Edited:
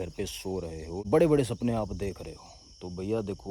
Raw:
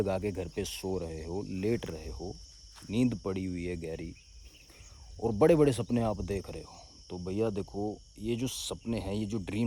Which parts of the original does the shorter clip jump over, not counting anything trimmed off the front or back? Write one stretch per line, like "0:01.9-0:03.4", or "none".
0:01.4-0:05.3